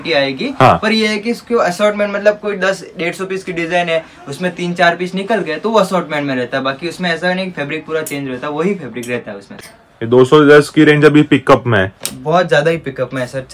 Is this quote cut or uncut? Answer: cut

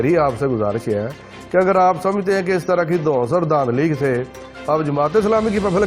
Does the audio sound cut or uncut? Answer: uncut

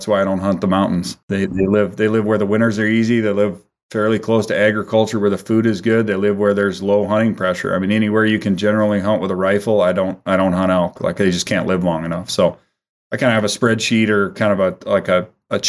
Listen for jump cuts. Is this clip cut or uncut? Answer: cut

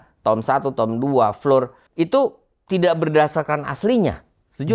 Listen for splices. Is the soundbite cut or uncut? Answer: cut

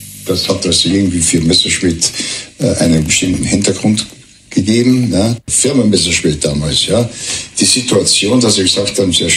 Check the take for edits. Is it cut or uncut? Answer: cut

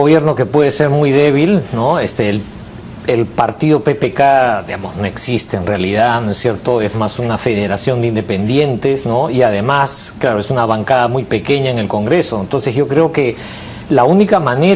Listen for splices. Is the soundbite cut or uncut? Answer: cut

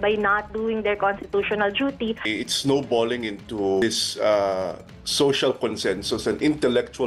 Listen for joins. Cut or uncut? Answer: cut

